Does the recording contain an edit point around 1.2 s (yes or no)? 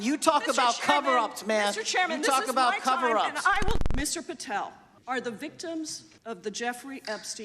no